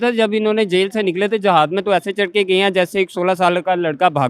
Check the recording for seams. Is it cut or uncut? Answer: uncut